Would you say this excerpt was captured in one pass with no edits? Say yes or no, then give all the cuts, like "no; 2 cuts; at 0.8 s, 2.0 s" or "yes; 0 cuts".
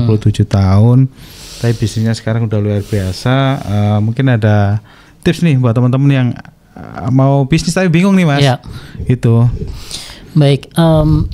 yes; 0 cuts